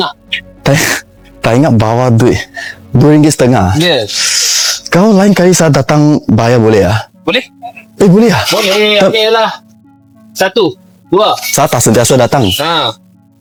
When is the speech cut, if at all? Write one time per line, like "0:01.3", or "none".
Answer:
none